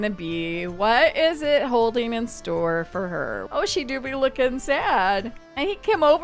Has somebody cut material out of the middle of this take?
no; 0 cuts

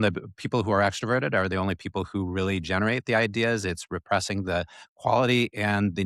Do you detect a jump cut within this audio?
no; 0 cuts

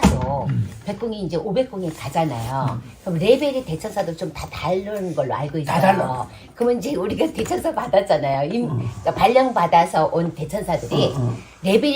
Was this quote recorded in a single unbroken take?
yes; 0 cuts

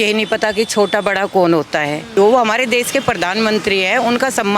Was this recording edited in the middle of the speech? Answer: yes; 1 cut; at 2.2 s

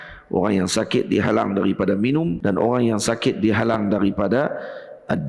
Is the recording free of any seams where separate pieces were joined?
no; 1 cut; at 2.4 s

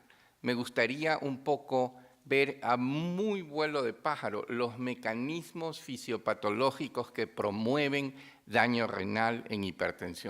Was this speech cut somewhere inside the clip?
yes; 1 cut; at 6.3 s

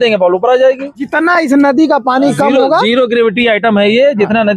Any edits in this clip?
yes; 1 cut; at 1.1 s

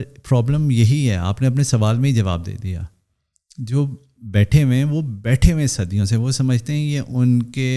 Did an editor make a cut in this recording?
no; 0 cuts

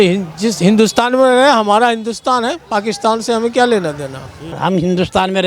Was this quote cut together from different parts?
yes; 1 cut; at 4.4 s

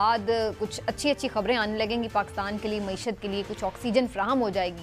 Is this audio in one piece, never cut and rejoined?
yes; 0 cuts

